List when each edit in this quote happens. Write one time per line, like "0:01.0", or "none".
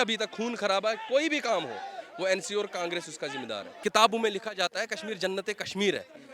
0:03.8